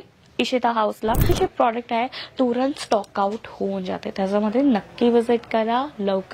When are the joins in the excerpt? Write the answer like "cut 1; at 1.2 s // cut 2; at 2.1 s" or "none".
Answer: cut 1; at 1.3 s